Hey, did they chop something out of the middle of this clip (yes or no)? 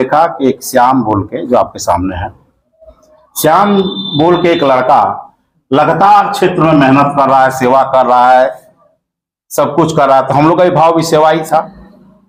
no